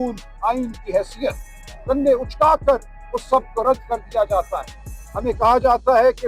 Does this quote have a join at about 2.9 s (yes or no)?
no